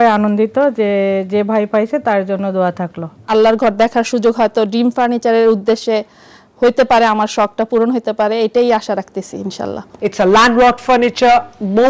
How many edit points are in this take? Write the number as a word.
two